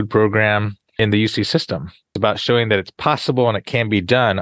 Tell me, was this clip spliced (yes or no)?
yes